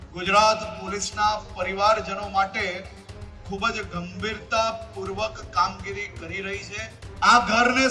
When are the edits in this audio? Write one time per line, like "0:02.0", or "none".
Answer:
0:07.0